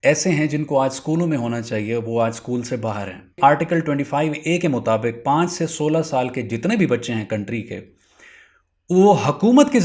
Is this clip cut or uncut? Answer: cut